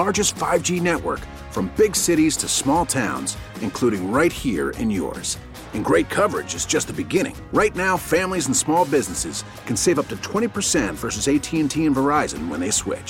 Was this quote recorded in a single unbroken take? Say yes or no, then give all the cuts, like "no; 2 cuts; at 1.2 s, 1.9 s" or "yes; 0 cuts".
yes; 0 cuts